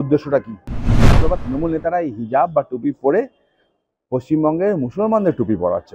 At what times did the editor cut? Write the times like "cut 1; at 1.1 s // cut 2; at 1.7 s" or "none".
cut 1; at 1.1 s

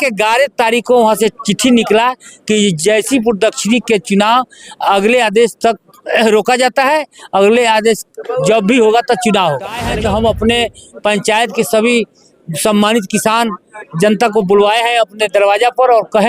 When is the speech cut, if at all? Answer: cut 1; at 9.8 s

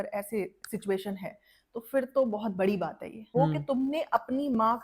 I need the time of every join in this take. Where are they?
cut 1; at 3.3 s

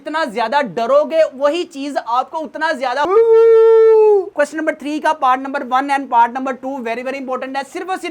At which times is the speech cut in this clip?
cut 1; at 4.3 s

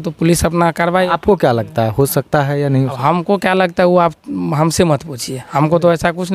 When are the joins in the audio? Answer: none

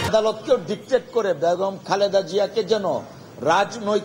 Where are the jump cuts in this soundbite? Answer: none

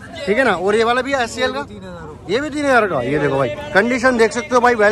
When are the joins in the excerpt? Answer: none

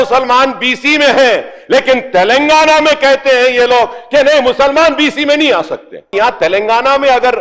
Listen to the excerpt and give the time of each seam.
cut 1; at 6.1 s

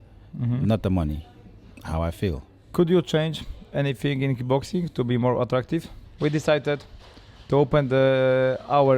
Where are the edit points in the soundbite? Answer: cut 1; at 2.5 s // cut 2; at 6.0 s

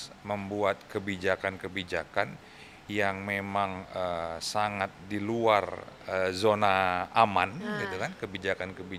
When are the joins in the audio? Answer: none

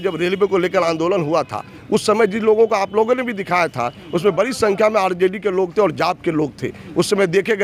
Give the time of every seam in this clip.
none

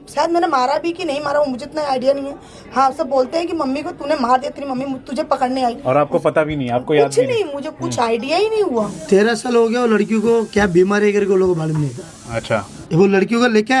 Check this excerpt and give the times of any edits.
cut 1; at 9.0 s // cut 2; at 12.7 s

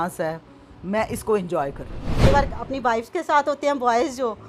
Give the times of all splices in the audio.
cut 1; at 2.3 s

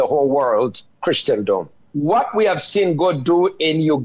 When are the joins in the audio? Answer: cut 1; at 1.8 s

